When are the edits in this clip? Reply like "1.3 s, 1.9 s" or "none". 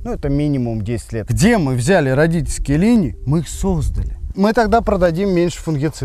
1.3 s, 4.2 s